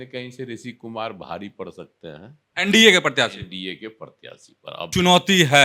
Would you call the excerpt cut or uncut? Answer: cut